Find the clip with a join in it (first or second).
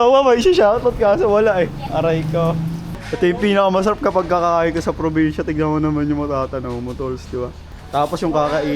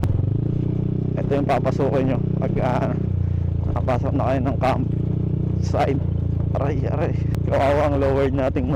first